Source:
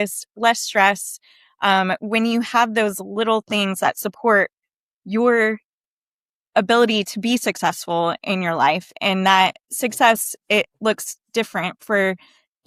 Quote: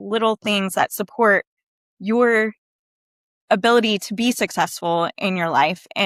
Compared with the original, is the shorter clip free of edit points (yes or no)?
yes